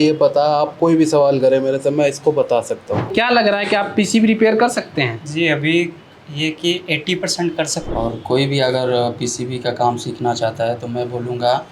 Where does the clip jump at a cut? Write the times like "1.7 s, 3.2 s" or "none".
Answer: 3.1 s, 7.8 s

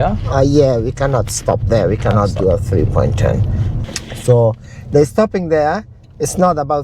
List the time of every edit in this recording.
3.6 s

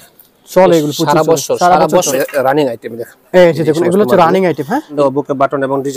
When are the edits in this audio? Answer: 2.1 s, 4.9 s

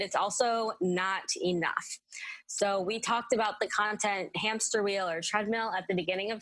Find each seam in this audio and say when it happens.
none

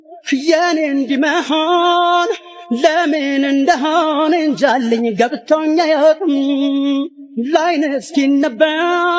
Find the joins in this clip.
none

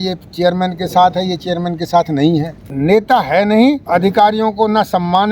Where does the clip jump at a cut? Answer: 2.6 s, 3.8 s

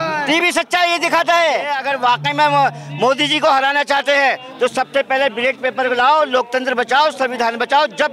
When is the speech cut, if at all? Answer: 1.8 s

